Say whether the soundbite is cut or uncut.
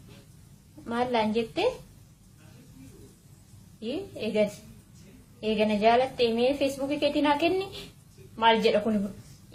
uncut